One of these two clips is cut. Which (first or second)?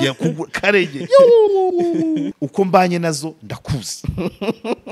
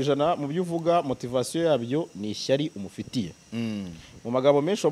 first